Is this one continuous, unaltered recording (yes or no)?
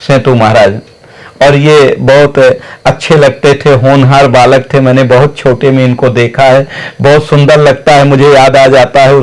yes